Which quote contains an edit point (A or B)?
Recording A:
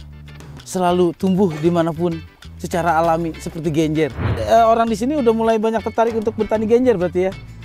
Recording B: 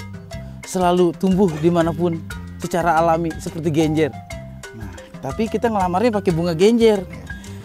A